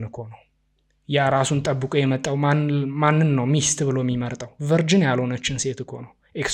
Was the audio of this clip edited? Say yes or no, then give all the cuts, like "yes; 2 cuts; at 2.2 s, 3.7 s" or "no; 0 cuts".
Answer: no; 0 cuts